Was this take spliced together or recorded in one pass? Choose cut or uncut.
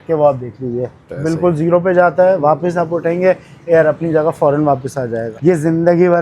cut